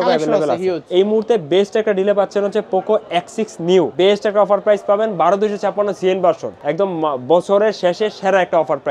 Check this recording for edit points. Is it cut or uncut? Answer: cut